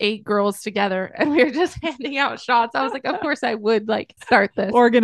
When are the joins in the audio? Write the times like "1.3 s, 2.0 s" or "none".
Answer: 4.1 s